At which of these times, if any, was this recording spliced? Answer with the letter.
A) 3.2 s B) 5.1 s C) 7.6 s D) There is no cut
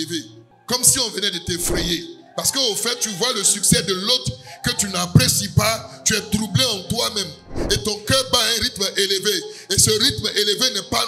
D